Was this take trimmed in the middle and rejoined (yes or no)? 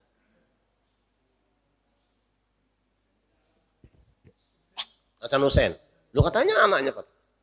no